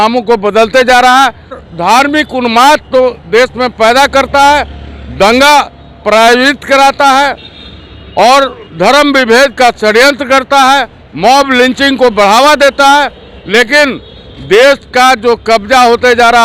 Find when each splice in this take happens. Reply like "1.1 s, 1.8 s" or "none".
1.6 s